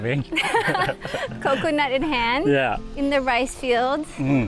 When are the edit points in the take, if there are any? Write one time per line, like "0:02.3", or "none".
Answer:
0:02.9

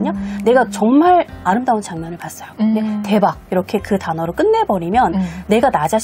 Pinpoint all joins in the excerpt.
none

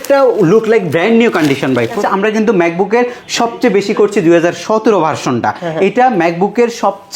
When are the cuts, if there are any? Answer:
0:02.0

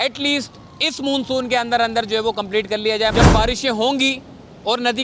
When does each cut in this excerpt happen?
0:03.1

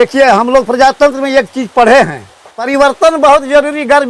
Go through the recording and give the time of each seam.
0:02.7

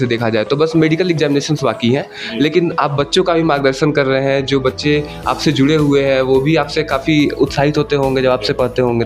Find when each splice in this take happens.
none

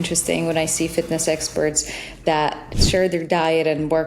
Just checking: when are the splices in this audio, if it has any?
0:02.7

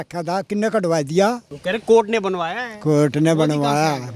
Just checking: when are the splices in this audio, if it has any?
0:01.5

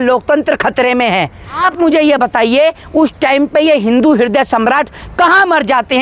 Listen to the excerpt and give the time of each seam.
0:01.6

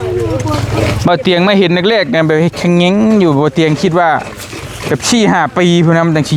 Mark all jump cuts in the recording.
none

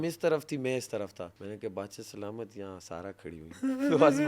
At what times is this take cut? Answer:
0:01.4

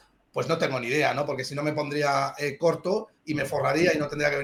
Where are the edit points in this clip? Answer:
none

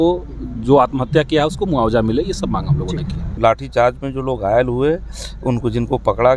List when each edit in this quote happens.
0:03.3

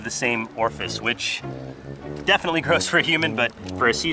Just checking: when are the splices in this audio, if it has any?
0:02.0

